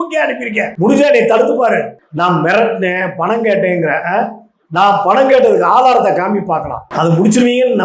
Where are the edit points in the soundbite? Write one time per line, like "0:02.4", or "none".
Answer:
0:01.9
0:06.8